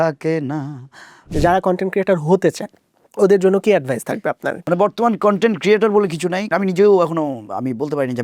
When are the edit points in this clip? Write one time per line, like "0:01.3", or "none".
0:01.3
0:04.5
0:06.5